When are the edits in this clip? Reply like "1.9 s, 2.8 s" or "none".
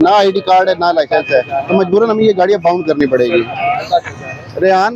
none